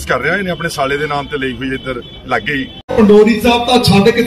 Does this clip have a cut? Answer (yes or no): yes